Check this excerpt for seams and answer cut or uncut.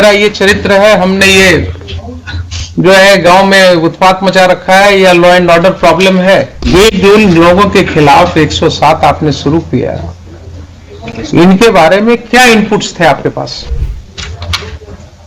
cut